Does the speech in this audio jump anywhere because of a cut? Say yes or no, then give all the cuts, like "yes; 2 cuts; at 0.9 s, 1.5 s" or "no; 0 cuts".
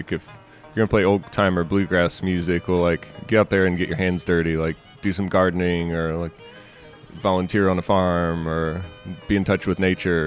no; 0 cuts